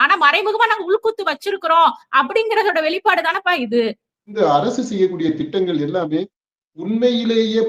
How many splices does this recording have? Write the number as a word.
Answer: one